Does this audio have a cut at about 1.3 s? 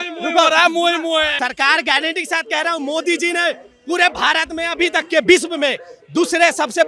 yes; 1 cut; at 1.3 s

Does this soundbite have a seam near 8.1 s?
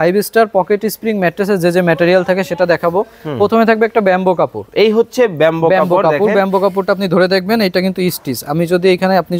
no; 0 cuts

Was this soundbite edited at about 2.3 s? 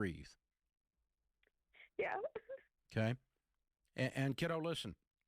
no; 0 cuts

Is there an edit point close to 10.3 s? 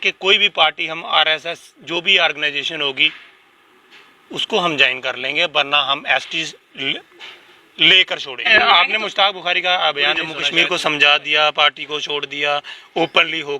yes; 2 cuts; at 8.4 s, 10.3 s

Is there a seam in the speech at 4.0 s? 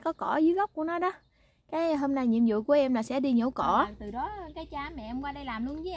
yes; 1 cut; at 4.0 s

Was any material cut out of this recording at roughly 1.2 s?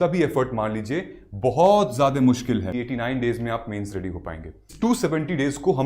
no; 2 cuts; at 2.7 s, 4.6 s

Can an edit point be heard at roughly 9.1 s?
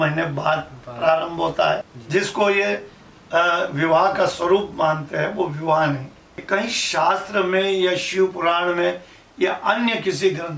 no; 2 cuts; at 1.9 s, 6.4 s

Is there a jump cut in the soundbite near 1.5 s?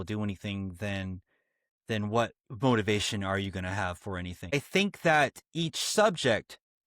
no; 1 cut; at 4.5 s

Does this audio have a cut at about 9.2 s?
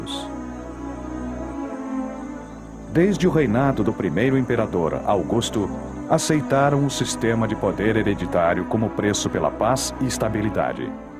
no; 1 cut; at 5.8 s

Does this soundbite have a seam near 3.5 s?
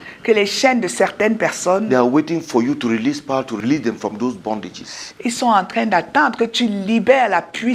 yes; 1 cut; at 3.5 s

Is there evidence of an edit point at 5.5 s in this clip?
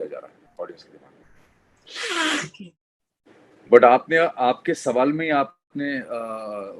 no; 1 cut; at 2.5 s

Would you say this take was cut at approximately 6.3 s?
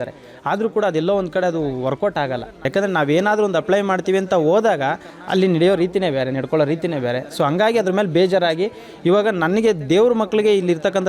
no; 1 cut; at 2.6 s

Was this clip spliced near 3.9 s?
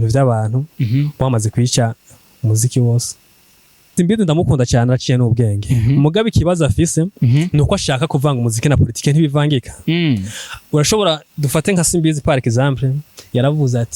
yes; 1 cut; at 3.9 s

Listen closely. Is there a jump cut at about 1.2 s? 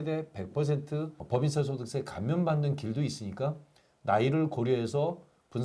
yes; 1 cut; at 1.2 s

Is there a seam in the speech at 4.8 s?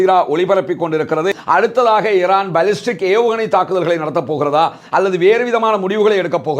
no; 1 cut; at 1.4 s

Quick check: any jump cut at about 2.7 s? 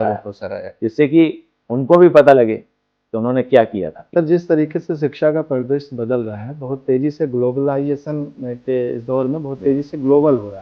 no; 1 cut; at 4.0 s

